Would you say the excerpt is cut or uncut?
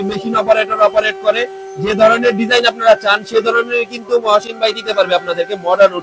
uncut